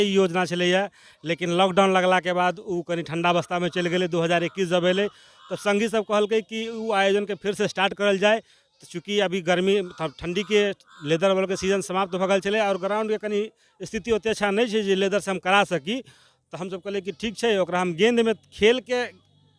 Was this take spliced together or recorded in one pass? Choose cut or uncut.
uncut